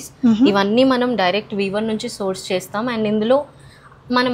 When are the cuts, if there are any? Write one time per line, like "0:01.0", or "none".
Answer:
none